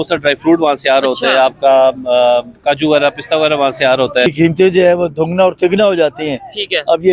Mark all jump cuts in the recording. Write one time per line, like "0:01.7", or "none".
0:04.3

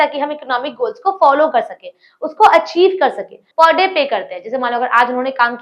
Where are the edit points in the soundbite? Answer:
0:03.4

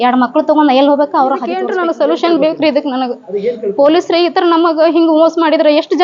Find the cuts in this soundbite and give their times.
0:01.7

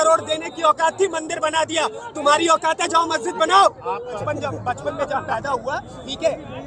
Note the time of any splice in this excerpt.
0:04.2

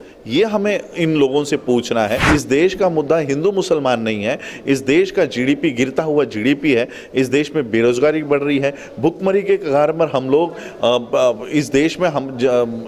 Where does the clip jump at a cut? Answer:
0:02.3

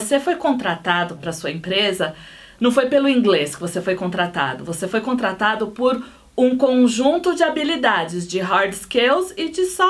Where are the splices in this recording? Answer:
0:01.2

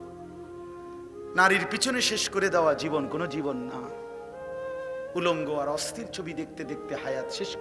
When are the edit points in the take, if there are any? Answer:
0:01.0

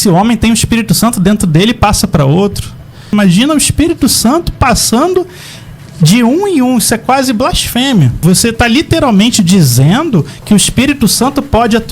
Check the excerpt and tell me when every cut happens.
0:03.1
0:08.2

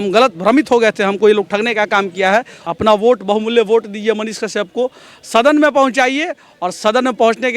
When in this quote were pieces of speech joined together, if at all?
0:02.6

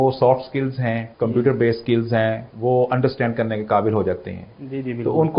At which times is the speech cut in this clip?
0:01.1
0:02.5

